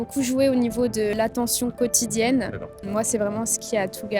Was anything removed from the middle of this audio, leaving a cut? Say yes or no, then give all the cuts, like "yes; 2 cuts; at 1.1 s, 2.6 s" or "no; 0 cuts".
yes; 2 cuts; at 1.1 s, 2.8 s